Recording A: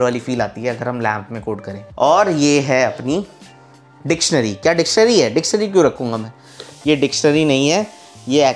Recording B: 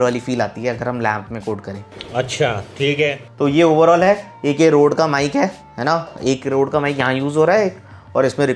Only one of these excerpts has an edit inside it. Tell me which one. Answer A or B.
A